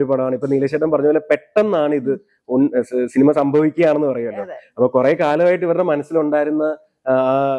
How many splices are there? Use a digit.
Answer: 0